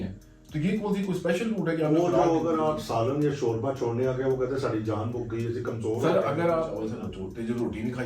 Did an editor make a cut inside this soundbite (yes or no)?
yes